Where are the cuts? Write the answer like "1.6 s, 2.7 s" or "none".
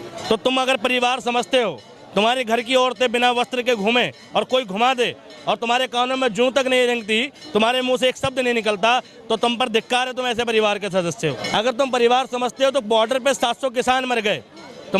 11.4 s